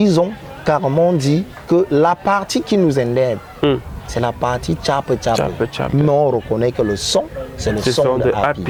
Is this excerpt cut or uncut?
uncut